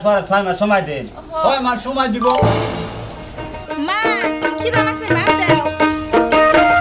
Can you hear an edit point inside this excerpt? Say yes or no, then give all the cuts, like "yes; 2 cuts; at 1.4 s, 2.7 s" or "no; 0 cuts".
no; 0 cuts